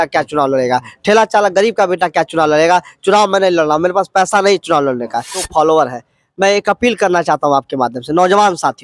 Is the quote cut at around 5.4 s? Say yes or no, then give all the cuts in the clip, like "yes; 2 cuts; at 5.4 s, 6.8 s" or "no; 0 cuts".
yes; 1 cut; at 5.4 s